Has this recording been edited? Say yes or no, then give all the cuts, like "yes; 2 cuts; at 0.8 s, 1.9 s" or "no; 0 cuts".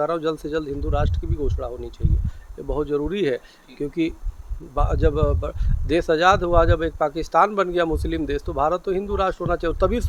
no; 0 cuts